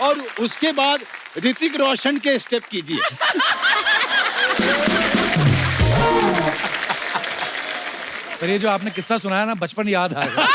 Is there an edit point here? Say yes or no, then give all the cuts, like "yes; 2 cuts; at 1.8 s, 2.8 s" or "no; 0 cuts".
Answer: no; 0 cuts